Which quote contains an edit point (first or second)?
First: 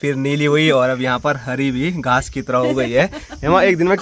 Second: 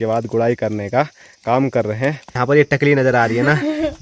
second